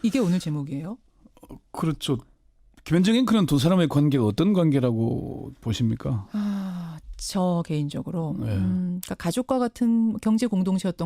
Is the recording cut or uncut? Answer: cut